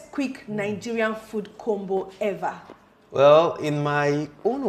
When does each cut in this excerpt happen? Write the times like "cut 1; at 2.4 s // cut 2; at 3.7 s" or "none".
none